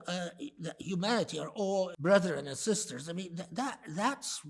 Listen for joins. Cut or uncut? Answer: cut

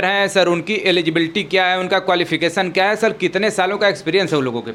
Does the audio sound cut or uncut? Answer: uncut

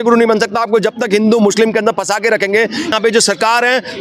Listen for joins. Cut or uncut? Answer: cut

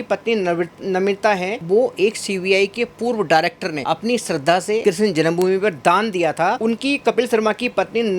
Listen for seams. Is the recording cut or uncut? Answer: cut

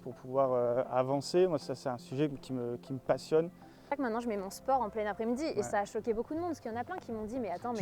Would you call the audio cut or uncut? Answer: cut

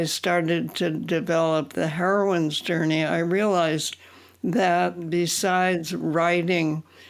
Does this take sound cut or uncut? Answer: cut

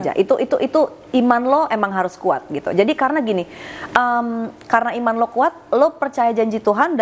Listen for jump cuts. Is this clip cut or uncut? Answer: uncut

